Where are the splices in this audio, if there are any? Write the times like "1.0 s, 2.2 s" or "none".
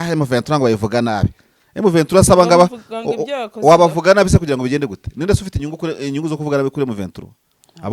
none